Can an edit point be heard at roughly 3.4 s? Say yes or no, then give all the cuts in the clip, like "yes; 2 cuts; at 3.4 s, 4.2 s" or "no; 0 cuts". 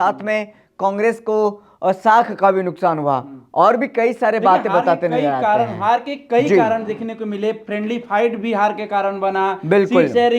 no; 0 cuts